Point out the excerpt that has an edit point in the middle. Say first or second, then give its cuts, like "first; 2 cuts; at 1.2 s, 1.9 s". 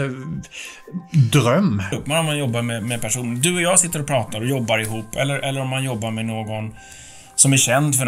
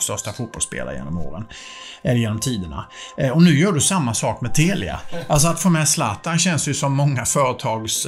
first; 1 cut; at 2.0 s